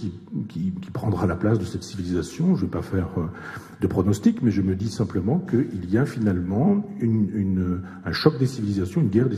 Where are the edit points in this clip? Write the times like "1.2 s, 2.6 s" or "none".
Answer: none